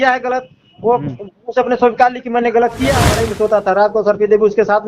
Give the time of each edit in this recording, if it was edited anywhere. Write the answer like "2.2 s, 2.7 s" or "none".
3.2 s